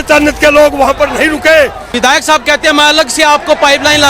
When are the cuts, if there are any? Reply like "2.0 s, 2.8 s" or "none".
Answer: 1.9 s